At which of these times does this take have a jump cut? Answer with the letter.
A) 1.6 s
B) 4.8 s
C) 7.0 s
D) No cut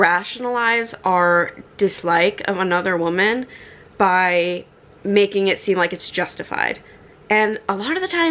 D